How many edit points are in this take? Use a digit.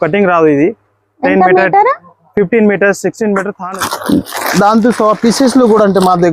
1